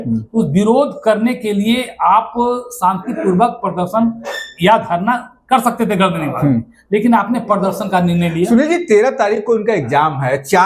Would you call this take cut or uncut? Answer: uncut